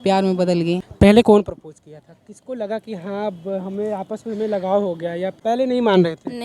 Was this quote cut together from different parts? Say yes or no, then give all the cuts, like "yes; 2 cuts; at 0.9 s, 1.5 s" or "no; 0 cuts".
yes; 3 cuts; at 0.9 s, 2.3 s, 5.4 s